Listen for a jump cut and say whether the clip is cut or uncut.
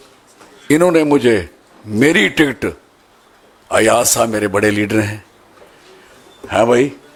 uncut